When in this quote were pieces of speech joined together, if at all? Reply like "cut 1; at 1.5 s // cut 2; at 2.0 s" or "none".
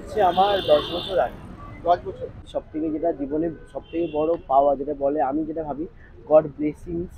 cut 1; at 2.5 s